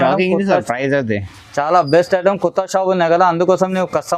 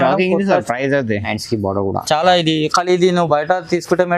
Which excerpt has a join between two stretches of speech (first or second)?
second